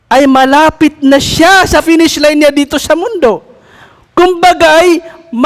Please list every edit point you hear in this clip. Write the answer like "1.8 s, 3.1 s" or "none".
1.8 s